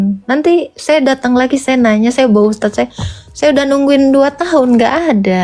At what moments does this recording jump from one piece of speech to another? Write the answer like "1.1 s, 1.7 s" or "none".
none